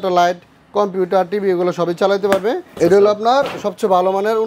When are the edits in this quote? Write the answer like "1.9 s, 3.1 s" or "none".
2.7 s